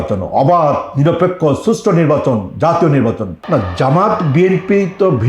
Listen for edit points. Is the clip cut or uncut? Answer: cut